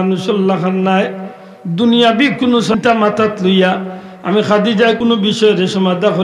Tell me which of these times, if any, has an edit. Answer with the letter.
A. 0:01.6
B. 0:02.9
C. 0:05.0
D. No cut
C